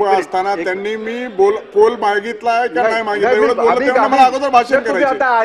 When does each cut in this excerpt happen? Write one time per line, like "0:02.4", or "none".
none